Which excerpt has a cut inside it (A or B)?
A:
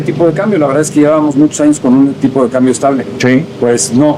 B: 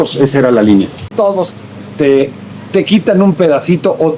B